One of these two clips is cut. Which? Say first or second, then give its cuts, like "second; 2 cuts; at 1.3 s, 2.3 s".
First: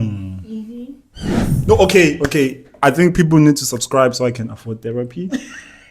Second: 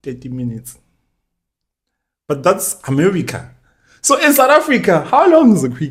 first; 1 cut; at 1.3 s